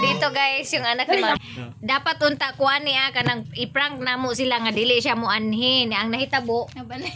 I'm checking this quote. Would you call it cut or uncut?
uncut